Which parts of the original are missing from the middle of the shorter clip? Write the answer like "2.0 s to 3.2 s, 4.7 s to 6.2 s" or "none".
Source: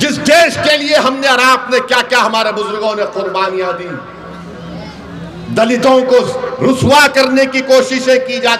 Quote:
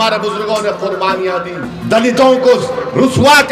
4.0 s to 5.3 s